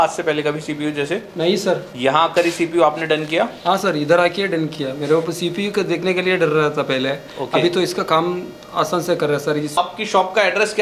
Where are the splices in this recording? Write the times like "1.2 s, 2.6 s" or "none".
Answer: 9.8 s